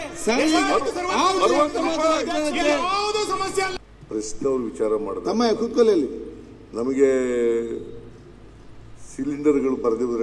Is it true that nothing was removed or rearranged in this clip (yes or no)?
no